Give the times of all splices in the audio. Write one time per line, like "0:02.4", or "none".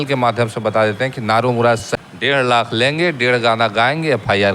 0:01.9

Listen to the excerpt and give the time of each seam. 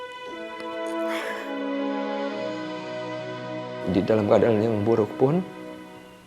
0:03.8
0:05.5

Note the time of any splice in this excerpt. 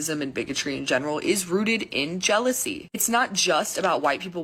none

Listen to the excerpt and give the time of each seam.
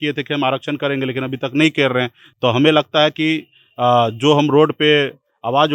none

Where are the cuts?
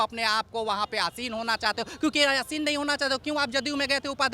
none

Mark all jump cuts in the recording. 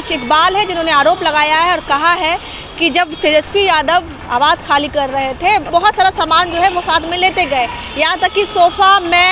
0:05.7

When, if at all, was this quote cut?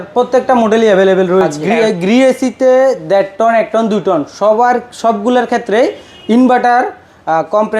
0:01.6

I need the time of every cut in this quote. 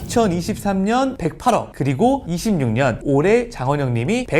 0:01.2
0:03.5

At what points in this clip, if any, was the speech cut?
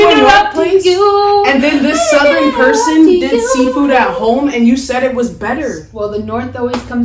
0:05.8

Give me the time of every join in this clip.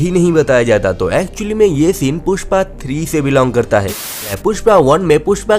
0:04.0

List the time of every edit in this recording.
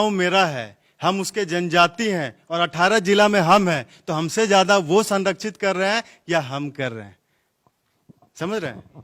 none

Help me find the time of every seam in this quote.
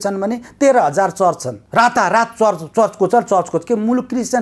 0:01.5

